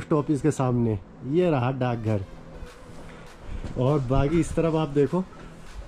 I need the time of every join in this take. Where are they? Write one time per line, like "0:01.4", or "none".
none